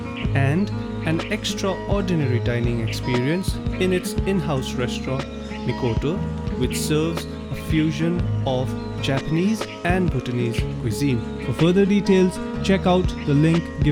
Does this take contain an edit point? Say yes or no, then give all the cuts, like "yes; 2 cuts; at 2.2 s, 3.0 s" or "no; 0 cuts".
no; 0 cuts